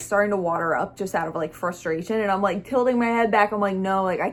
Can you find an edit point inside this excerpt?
no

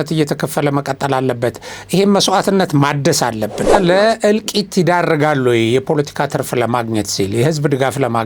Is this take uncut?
no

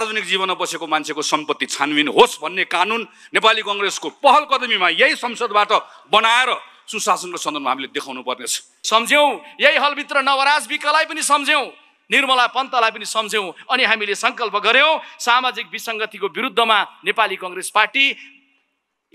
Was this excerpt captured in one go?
no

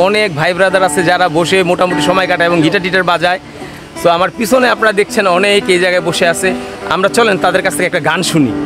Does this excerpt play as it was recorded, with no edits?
yes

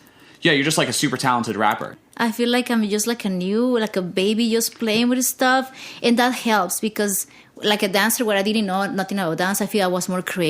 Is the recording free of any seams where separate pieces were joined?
no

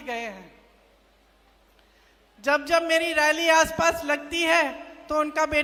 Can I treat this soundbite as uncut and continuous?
yes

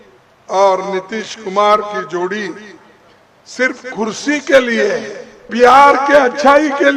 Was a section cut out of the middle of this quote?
yes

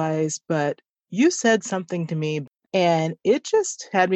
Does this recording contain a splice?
yes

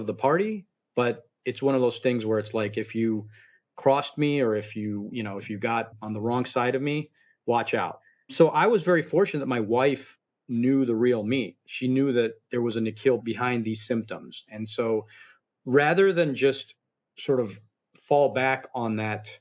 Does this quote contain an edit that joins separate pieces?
yes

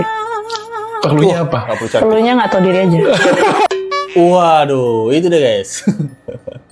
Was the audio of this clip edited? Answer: no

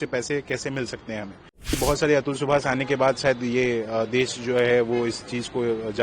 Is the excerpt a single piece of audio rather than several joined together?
no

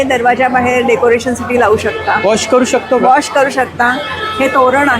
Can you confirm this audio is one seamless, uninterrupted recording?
yes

